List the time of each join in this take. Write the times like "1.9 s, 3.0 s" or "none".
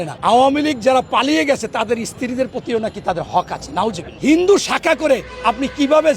4.1 s

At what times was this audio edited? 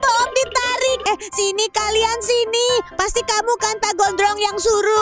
1.0 s

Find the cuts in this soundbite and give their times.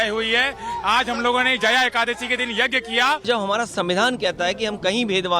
3.2 s

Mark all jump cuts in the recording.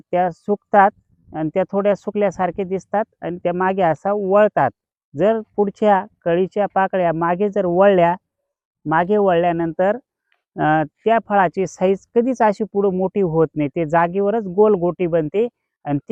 none

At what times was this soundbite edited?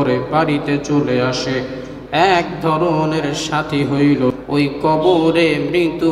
4.3 s

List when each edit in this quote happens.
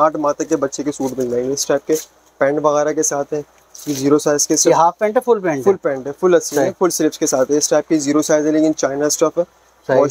none

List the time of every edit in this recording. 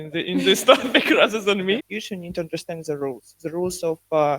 1.9 s

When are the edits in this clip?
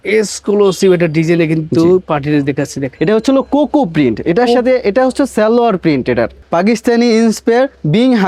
2.9 s, 6.4 s

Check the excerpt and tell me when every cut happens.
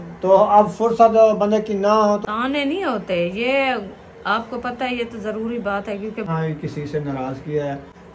2.2 s, 6.3 s

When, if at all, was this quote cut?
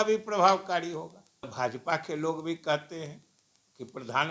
1.5 s

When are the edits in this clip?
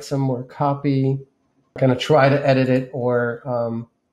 1.8 s

